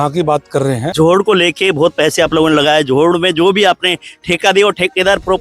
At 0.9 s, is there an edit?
yes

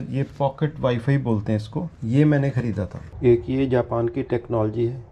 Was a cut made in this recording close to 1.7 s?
no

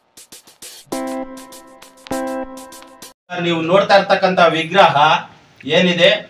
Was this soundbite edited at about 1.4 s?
no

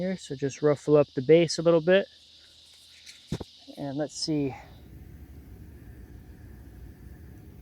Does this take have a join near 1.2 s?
no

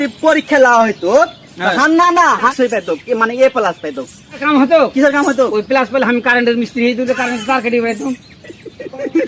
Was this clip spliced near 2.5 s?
yes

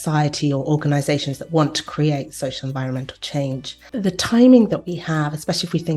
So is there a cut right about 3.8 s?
yes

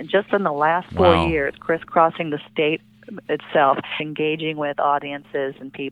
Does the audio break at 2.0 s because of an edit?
no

